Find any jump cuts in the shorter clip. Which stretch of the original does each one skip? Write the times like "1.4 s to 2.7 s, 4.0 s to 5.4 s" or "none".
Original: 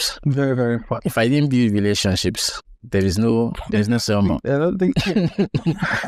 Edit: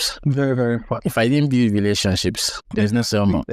2.6 s to 3.6 s